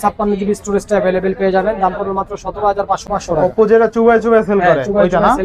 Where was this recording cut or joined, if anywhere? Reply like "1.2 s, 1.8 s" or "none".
3.0 s